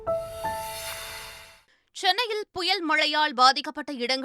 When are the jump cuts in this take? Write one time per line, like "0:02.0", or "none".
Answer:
0:01.0